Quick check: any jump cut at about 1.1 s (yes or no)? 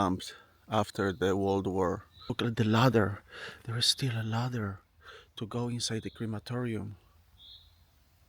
no